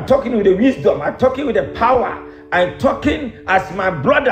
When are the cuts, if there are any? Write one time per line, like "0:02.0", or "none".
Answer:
none